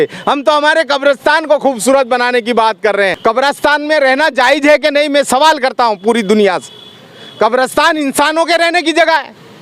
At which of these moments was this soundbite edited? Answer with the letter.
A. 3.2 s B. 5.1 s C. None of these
A